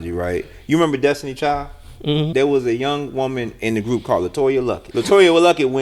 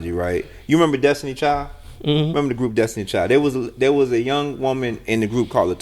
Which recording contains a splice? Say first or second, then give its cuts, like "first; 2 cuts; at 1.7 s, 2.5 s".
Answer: first; 2 cuts; at 2.3 s, 4.8 s